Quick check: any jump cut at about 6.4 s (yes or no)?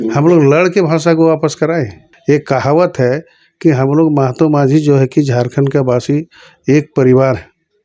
no